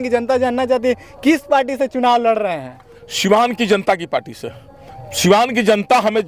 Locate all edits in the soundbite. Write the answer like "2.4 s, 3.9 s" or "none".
none

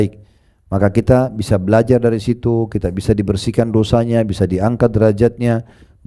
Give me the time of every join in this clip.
none

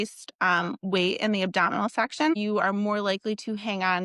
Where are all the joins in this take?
2.3 s

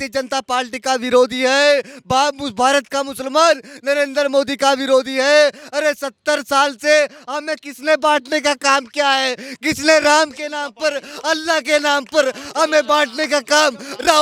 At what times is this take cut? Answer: none

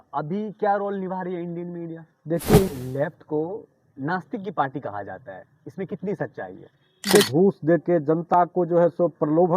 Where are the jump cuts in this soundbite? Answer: 2.7 s, 7.3 s

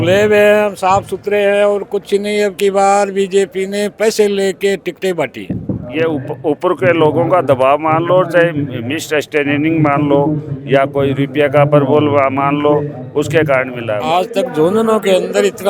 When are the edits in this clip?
5.9 s, 14.0 s

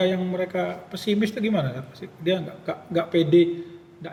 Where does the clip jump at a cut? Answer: none

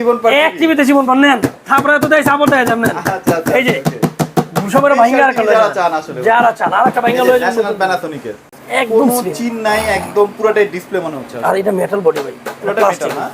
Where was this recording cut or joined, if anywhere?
8.4 s

